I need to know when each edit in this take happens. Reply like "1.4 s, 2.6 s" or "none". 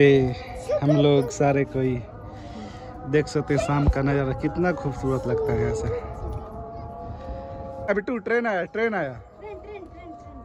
7.9 s